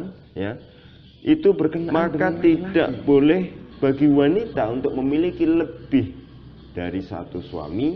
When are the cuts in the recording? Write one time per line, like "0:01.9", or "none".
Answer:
0:01.9